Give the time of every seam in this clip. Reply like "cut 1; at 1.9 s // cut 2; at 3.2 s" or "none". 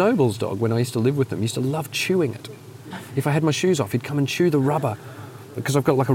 none